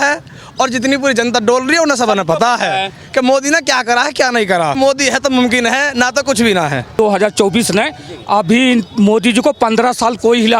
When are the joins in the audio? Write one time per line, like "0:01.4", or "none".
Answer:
0:04.8
0:07.0